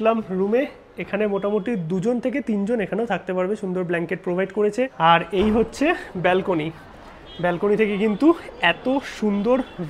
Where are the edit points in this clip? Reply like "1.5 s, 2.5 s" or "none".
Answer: 4.9 s